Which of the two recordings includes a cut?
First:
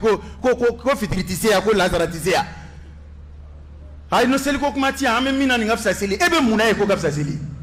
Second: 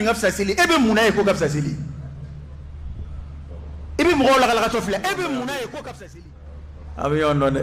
second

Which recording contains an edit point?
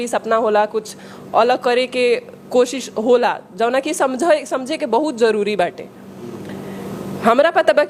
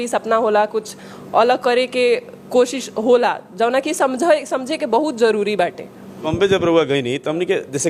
second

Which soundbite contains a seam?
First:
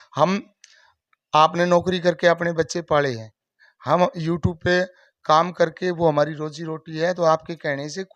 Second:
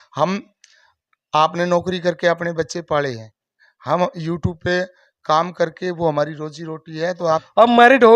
second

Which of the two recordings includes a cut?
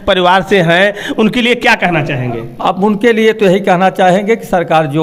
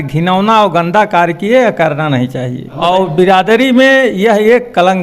second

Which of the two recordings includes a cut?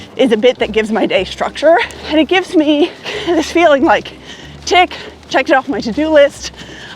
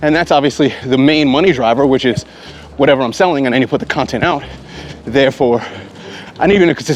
first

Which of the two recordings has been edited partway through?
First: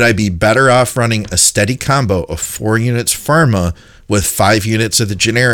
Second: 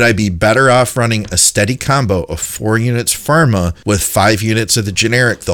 second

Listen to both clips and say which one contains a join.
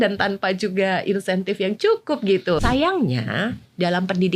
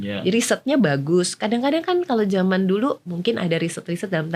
first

